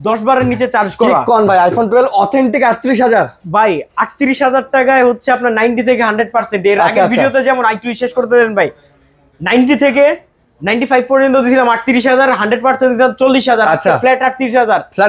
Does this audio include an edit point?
no; 0 cuts

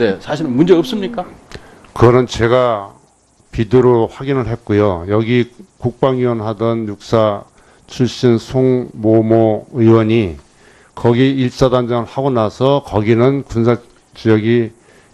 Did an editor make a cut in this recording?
no; 0 cuts

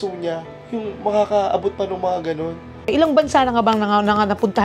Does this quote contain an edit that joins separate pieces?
yes; 1 cut; at 2.9 s

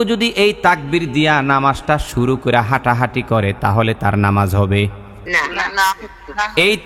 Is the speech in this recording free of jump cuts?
no; 1 cut; at 5.1 s

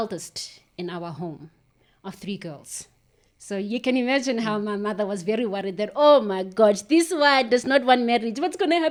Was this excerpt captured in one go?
yes; 0 cuts

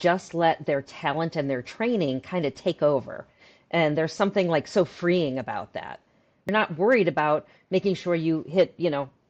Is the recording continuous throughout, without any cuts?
no; 1 cut; at 6.4 s

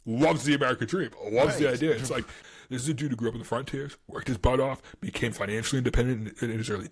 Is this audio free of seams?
no; 1 cut; at 2.3 s

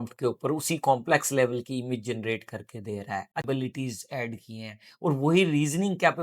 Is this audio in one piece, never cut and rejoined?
no; 1 cut; at 3.4 s

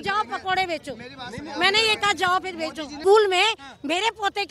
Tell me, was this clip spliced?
no; 0 cuts

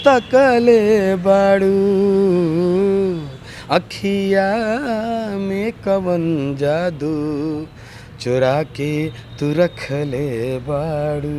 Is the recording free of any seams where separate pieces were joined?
yes; 0 cuts

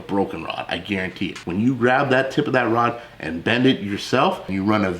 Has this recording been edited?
yes; 1 cut; at 1.4 s

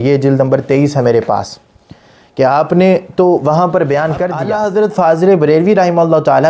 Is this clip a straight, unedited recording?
no; 1 cut; at 4.5 s

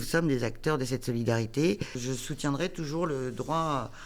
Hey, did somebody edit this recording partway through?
yes; 1 cut; at 2.0 s

